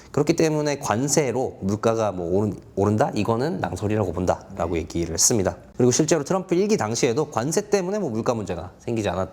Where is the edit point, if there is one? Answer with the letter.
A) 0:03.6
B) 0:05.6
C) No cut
B